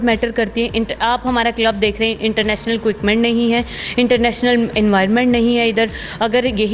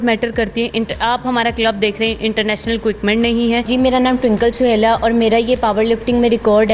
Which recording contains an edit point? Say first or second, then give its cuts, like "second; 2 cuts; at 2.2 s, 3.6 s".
second; 1 cut; at 3.7 s